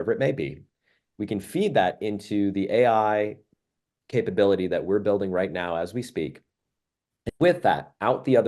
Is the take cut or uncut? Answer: uncut